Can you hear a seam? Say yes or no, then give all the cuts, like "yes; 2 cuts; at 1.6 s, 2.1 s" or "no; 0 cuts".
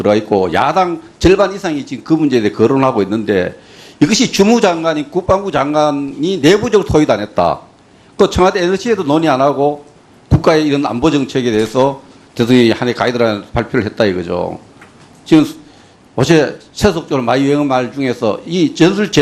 yes; 1 cut; at 13.8 s